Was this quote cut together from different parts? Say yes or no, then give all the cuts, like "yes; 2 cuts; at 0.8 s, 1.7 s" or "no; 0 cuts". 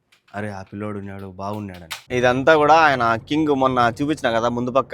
yes; 1 cut; at 2.0 s